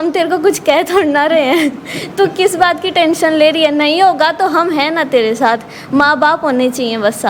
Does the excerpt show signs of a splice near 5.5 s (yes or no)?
no